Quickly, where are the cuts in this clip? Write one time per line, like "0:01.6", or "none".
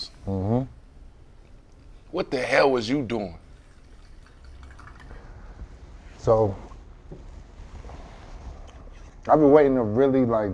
0:09.1

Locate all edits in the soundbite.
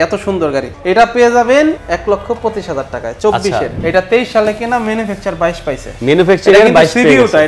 0:01.8
0:03.7

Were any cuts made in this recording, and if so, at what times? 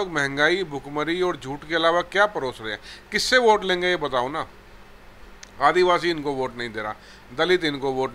none

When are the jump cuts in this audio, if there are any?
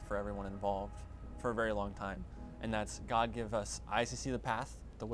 none

